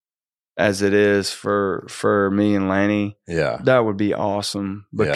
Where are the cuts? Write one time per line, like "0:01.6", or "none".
none